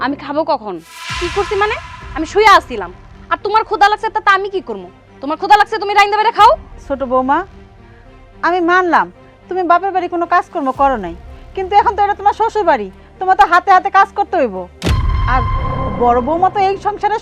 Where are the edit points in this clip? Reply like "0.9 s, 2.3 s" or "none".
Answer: none